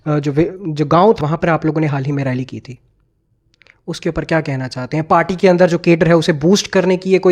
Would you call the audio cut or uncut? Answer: cut